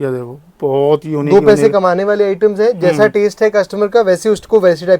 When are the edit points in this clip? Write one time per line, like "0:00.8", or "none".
none